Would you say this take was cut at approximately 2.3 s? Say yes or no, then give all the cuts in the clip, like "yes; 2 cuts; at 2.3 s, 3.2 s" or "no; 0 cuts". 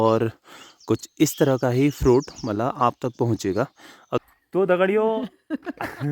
no; 1 cut; at 4.2 s